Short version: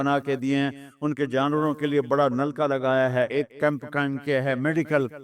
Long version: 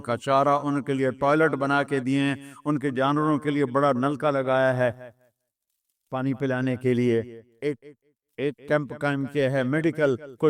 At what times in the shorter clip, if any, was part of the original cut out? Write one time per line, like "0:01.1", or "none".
0:03.3